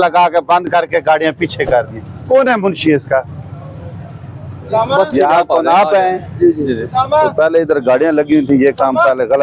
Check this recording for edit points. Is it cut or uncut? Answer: uncut